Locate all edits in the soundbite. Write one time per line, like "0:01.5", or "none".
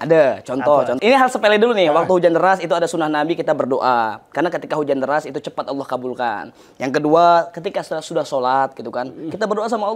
0:00.9